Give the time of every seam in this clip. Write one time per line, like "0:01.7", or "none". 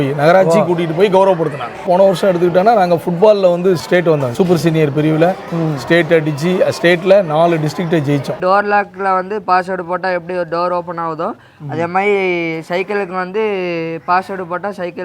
0:01.8
0:03.8
0:08.4